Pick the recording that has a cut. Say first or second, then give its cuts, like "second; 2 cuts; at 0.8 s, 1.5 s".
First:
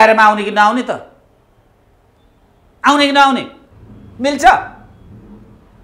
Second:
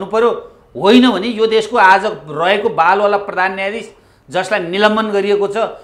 first; 1 cut; at 3.6 s